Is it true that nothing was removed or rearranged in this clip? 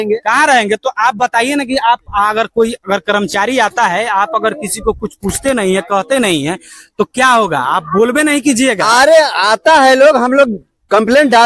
yes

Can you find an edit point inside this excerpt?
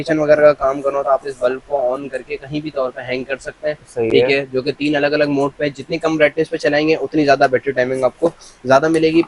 no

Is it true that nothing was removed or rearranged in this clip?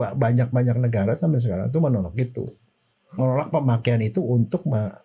yes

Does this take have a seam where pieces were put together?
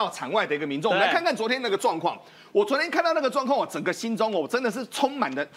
no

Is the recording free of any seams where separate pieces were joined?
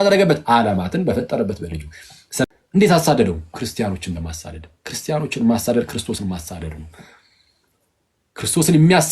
no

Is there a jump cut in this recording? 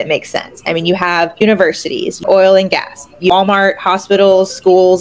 yes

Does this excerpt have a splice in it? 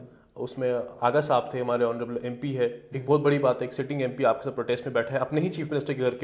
no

